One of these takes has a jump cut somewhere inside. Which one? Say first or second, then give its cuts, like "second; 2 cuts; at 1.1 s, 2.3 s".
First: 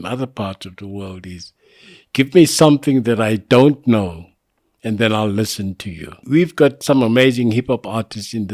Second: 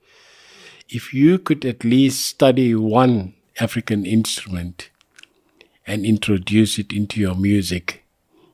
first; 1 cut; at 6.2 s